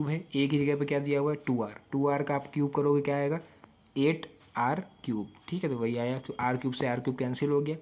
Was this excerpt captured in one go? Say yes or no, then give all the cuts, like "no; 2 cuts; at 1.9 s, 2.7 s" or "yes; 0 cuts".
yes; 0 cuts